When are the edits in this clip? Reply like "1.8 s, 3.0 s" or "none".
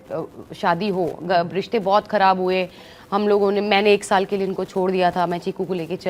none

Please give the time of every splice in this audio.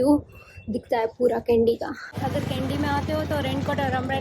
2.1 s

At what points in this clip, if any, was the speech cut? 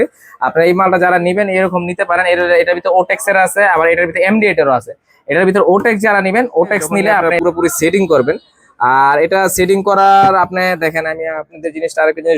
7.3 s

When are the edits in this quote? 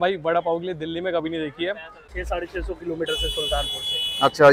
2.0 s

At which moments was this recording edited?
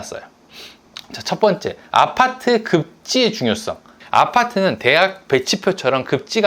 4.0 s

